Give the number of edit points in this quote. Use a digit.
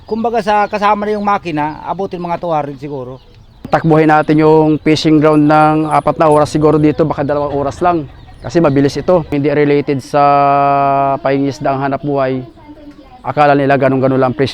2